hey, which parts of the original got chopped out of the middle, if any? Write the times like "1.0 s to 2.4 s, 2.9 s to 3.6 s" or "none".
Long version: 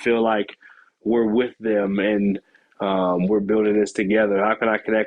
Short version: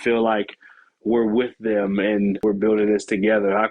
2.4 s to 3.3 s

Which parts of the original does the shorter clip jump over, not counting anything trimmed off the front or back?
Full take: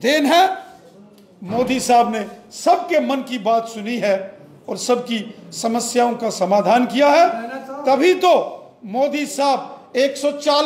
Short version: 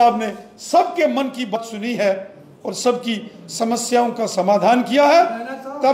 3.5 s to 3.6 s

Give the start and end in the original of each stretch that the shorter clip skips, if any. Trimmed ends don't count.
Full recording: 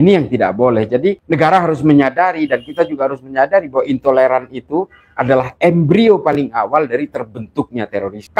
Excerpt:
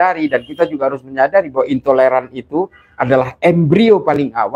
none

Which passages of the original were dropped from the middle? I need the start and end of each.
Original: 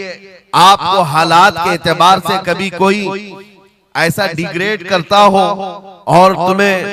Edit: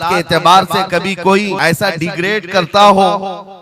3.1 s to 3.9 s

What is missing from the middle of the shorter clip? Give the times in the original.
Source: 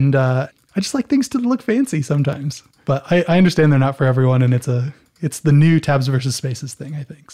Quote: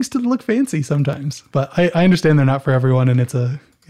2.5 s to 2.7 s

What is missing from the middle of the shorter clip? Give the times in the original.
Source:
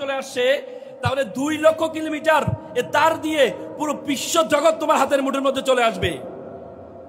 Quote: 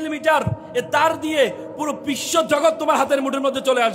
none

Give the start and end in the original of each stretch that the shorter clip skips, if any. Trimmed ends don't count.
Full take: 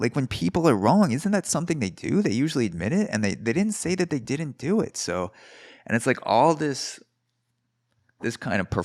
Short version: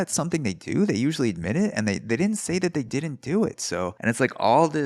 5.3 s to 5.8 s

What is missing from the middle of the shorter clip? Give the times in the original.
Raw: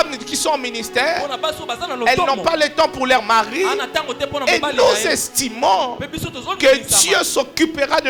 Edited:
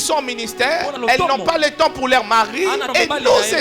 1.3 s to 1.9 s, 3.8 s to 4.4 s

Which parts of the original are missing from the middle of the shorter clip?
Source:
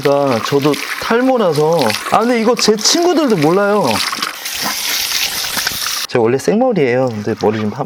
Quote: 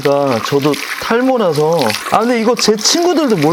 none

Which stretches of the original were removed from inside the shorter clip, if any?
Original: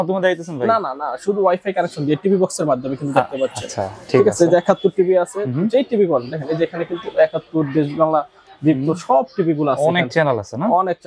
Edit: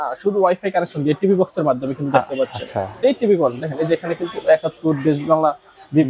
4.0 s to 5.7 s

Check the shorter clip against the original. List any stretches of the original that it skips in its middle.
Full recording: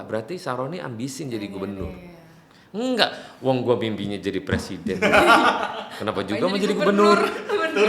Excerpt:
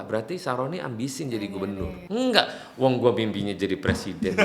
2.0 s to 2.6 s

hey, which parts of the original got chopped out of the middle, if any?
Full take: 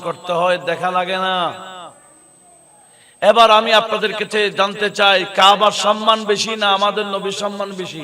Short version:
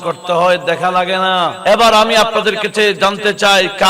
1.6 s to 3.1 s

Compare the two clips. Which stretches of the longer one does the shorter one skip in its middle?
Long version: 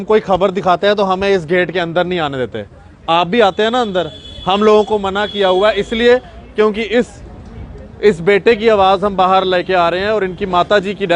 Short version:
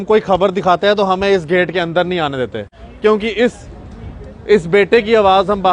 2.8 s to 6.4 s

